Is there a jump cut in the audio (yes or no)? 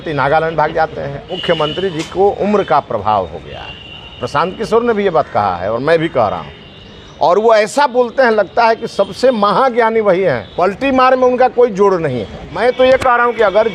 yes